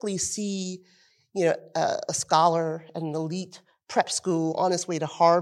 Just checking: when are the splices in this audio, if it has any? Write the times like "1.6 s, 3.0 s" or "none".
none